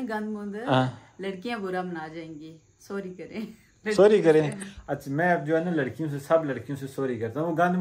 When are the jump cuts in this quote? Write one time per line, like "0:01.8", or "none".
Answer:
none